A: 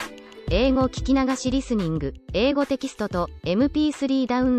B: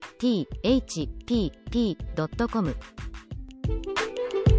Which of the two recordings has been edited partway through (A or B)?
B